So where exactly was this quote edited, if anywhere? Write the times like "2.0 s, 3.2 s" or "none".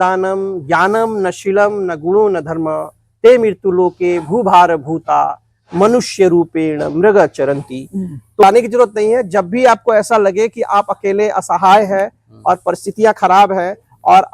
8.4 s